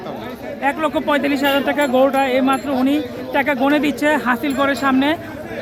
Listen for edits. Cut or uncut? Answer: uncut